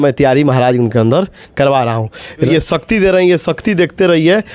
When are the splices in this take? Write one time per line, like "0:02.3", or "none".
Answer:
0:02.5